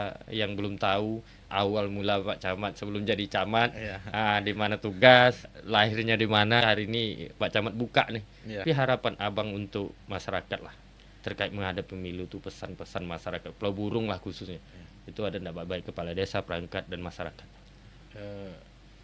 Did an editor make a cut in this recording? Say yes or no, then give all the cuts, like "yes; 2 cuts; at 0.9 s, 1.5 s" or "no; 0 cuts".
yes; 3 cuts; at 5.5 s, 6.6 s, 8.6 s